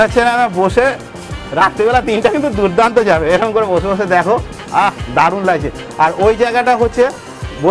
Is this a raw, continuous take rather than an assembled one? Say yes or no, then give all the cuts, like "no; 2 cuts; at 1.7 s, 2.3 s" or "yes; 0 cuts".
yes; 0 cuts